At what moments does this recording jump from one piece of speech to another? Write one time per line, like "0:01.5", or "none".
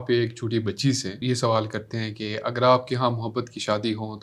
0:01.2